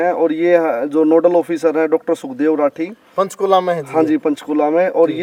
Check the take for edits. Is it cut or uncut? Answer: uncut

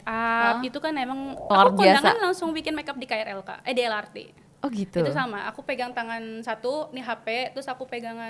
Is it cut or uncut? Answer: cut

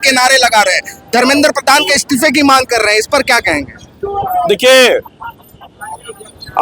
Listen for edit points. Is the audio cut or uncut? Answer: uncut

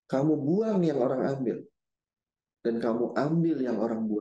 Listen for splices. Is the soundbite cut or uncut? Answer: uncut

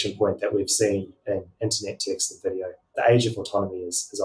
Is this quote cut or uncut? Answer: cut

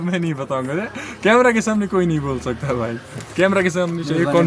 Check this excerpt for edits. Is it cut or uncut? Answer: uncut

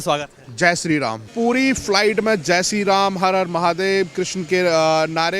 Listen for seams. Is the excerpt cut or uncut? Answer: cut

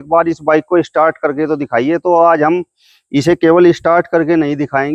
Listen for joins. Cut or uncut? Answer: uncut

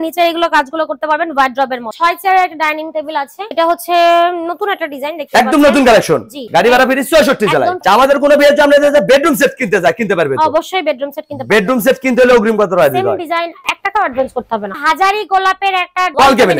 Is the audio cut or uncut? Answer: cut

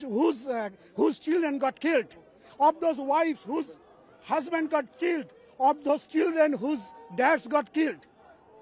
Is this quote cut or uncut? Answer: uncut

